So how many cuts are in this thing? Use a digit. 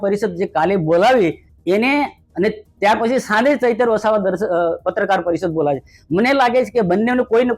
1